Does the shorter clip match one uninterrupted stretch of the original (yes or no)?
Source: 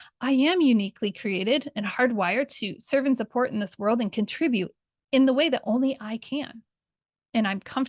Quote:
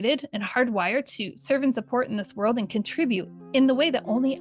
no